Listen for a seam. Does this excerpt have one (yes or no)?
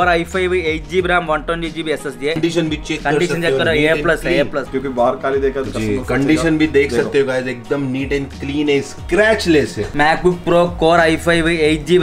yes